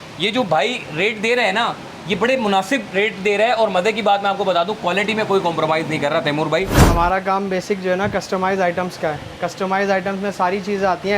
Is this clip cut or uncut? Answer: cut